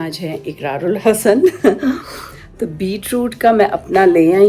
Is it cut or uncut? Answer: uncut